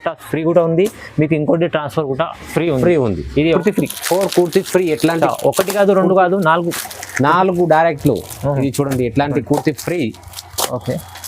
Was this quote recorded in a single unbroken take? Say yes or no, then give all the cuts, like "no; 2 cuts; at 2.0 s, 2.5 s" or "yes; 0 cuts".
no; 1 cut; at 3.6 s